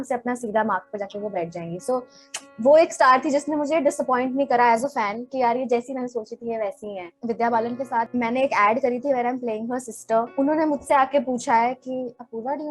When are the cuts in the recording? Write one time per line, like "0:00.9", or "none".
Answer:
0:07.1
0:08.1
0:10.3